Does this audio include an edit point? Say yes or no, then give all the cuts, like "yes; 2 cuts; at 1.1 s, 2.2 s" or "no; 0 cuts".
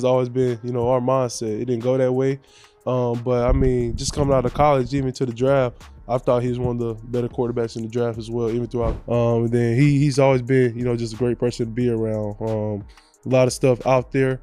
yes; 1 cut; at 8.9 s